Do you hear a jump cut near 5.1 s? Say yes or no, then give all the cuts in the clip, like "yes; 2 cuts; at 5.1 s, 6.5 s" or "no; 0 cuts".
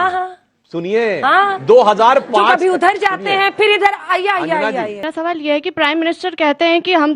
yes; 1 cut; at 5.1 s